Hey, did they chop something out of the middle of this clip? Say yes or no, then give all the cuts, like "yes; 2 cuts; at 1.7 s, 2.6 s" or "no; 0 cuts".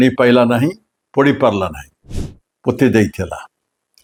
no; 0 cuts